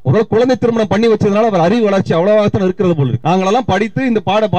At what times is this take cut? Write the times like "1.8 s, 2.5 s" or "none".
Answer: 3.2 s